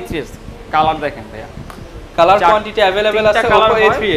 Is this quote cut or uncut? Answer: uncut